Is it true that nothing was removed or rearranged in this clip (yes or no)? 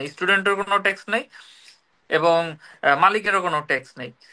yes